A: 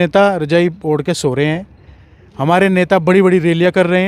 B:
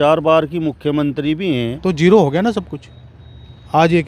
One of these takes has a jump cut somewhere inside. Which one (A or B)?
B